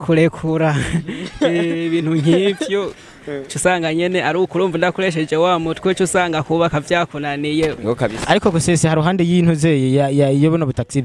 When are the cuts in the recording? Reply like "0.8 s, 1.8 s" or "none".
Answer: 7.8 s